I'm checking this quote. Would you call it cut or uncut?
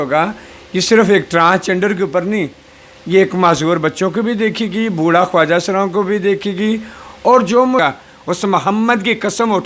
cut